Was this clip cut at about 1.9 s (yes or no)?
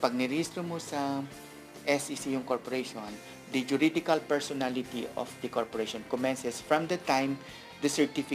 no